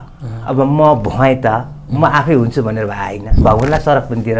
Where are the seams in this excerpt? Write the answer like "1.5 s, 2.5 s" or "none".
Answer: 3.3 s